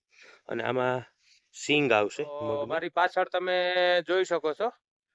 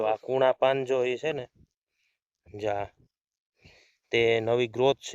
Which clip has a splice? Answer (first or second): first